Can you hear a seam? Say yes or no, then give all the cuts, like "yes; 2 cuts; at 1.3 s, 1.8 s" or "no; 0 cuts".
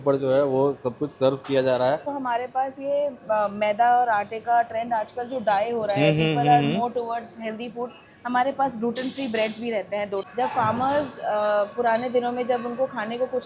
yes; 2 cuts; at 2.1 s, 10.2 s